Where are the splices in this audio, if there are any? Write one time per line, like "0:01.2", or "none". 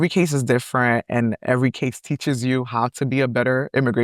none